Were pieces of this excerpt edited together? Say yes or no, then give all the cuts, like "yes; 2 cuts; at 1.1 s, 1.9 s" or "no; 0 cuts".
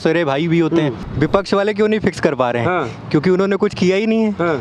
yes; 1 cut; at 1.0 s